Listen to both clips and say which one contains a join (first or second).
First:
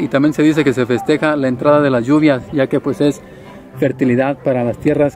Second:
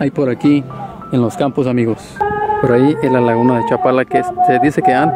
second